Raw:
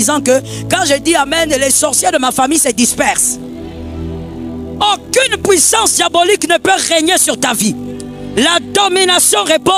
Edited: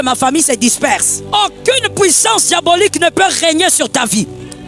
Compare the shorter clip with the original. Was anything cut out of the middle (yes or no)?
yes